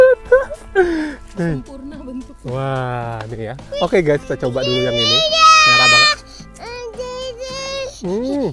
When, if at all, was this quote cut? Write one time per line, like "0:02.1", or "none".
0:03.6